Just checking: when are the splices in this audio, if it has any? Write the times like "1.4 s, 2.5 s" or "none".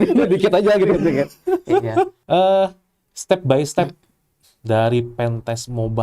2.2 s